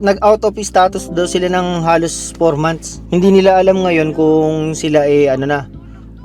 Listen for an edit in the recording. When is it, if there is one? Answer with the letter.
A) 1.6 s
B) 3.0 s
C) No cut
B